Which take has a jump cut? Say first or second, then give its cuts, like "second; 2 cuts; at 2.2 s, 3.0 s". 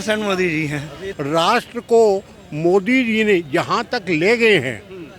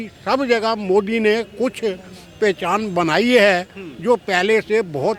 first; 1 cut; at 1.0 s